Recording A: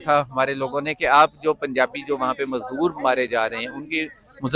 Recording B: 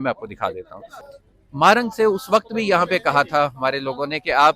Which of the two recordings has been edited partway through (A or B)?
B